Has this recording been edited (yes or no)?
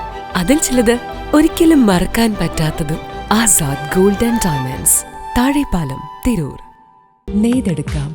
yes